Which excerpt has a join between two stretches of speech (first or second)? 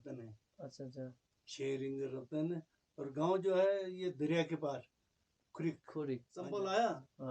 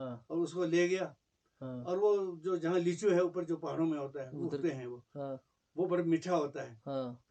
first